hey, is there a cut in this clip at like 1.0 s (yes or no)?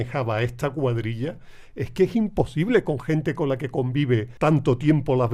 no